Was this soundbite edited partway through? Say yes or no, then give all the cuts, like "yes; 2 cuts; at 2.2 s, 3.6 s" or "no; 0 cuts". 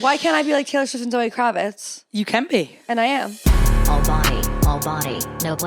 yes; 1 cut; at 3.4 s